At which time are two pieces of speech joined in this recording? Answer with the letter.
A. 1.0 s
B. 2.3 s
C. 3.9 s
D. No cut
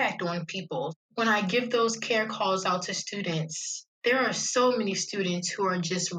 A